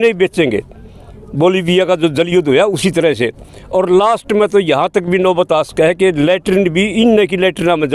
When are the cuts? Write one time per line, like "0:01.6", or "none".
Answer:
none